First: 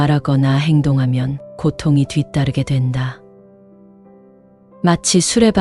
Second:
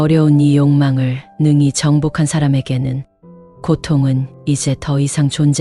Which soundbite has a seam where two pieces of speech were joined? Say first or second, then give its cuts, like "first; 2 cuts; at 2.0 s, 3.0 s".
first; 2 cuts; at 3.1 s, 4.5 s